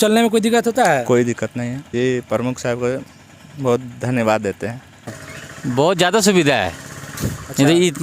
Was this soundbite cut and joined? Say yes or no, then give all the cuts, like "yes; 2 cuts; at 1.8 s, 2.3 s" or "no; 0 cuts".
yes; 2 cuts; at 1.8 s, 5.2 s